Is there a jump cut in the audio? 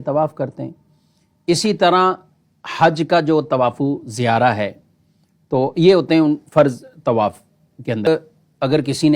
yes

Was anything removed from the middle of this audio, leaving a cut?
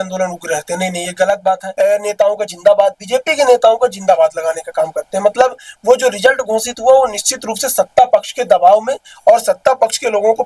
yes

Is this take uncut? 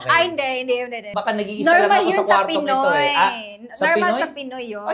no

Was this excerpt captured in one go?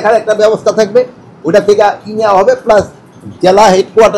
yes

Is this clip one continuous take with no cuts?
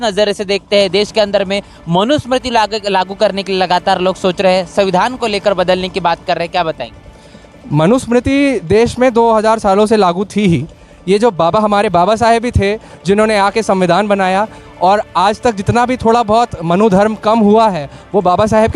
yes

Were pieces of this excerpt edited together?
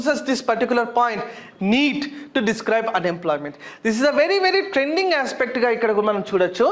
no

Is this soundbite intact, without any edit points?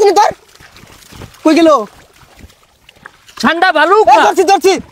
yes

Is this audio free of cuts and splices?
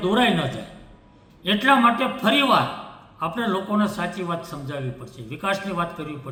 yes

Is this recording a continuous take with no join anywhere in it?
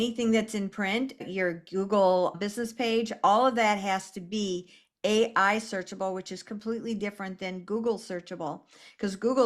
no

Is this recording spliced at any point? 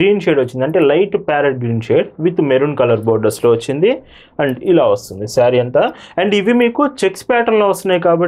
no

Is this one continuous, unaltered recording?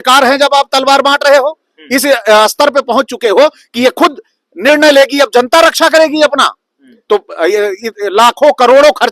yes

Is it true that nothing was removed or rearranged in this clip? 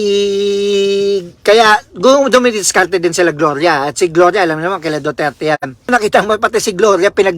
no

